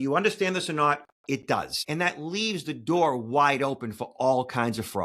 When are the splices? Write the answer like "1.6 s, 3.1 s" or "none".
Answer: 1.8 s